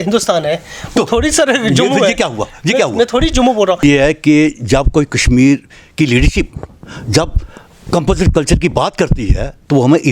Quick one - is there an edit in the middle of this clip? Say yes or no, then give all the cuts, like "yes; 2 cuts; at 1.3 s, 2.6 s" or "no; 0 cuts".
yes; 1 cut; at 3.8 s